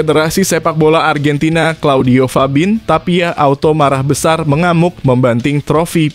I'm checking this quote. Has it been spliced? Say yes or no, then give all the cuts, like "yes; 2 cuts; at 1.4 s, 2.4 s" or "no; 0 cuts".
no; 0 cuts